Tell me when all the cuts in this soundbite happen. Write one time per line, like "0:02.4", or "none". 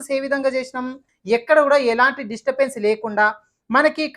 0:01.1